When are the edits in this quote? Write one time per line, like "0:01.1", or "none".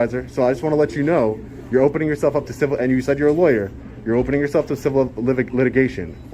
none